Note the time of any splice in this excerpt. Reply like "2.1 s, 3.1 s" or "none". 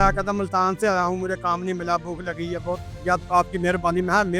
2.9 s